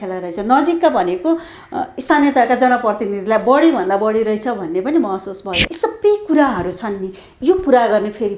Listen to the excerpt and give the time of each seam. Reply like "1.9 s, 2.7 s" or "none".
5.6 s